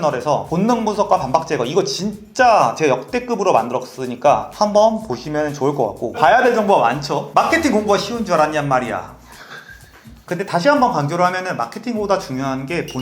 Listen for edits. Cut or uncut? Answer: cut